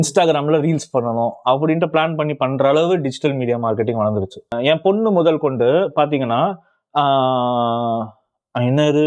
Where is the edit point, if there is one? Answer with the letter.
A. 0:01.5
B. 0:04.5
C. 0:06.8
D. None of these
B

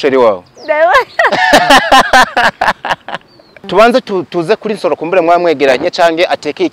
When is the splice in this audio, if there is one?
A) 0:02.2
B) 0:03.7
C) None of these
B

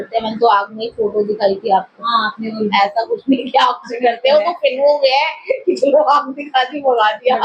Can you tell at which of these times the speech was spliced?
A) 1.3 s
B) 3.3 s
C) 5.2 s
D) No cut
D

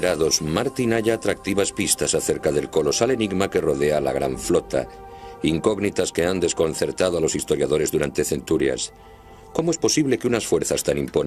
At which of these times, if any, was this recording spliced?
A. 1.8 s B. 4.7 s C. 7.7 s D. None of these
C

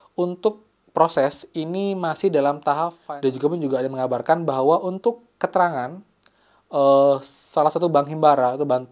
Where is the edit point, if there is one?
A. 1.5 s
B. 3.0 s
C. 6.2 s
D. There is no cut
B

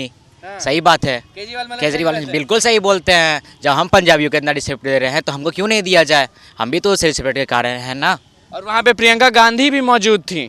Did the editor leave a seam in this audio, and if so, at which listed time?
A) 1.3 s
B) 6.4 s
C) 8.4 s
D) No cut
D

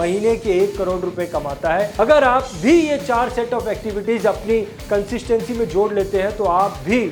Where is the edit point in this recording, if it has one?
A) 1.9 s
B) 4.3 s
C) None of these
A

